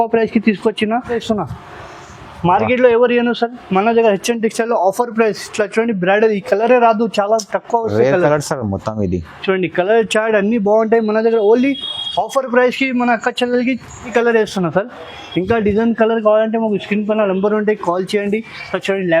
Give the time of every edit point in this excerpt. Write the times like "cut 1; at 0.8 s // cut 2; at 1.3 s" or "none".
cut 1; at 1.2 s // cut 2; at 14.1 s